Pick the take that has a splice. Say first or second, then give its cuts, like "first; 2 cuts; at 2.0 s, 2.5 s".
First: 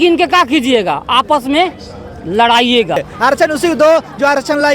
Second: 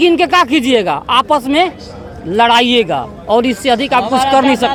first; 1 cut; at 3.1 s